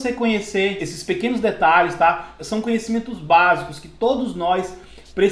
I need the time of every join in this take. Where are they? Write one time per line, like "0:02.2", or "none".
0:00.9
0:02.4